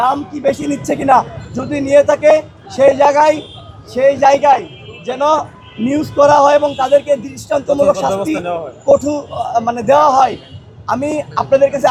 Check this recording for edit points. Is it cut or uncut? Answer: uncut